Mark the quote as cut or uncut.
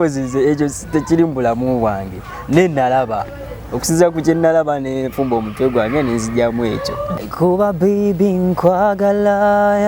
cut